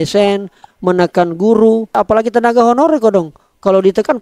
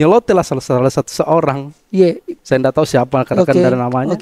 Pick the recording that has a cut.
first; 1 cut; at 2.0 s

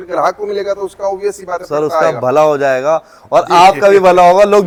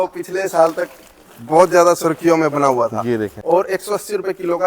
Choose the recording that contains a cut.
second; 1 cut; at 3.4 s

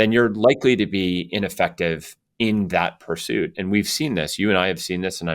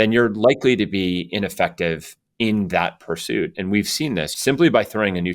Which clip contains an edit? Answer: second; 1 cut; at 4.3 s

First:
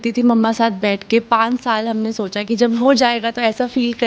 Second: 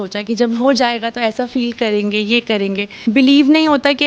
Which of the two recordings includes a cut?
second; 1 cut; at 2.9 s

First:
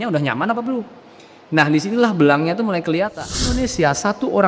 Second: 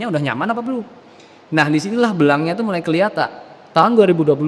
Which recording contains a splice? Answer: first; 1 cut; at 3.6 s

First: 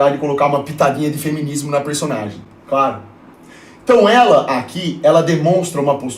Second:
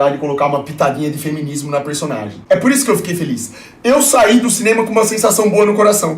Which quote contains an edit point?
second; 1 cut; at 2.3 s

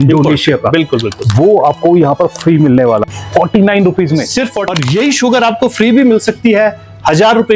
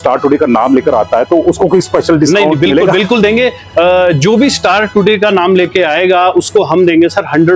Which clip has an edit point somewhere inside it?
first; 2 cuts; at 3.0 s, 4.6 s

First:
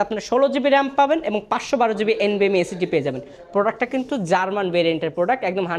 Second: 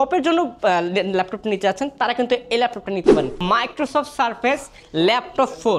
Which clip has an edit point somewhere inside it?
second; 1 cut; at 3.3 s

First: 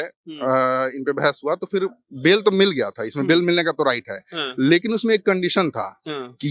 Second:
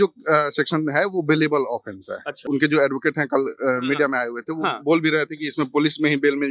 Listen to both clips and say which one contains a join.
second; 1 cut; at 2.3 s

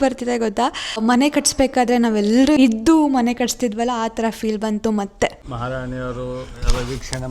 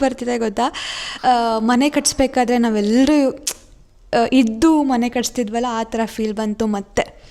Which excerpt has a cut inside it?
first; 3 cuts; at 1.0 s, 2.6 s, 5.5 s

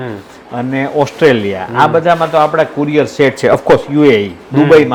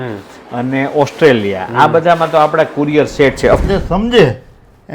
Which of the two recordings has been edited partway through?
second; 1 cut; at 3.6 s

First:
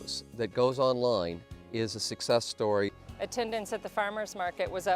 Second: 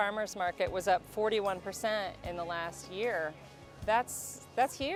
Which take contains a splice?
first; 1 cut; at 3.0 s

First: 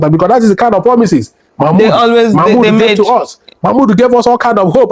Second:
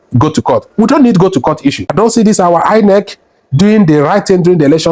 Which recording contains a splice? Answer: second; 1 cut; at 1.8 s

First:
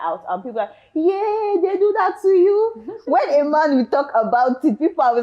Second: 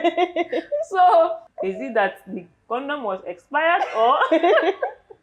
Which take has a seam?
second; 1 cut; at 1.5 s

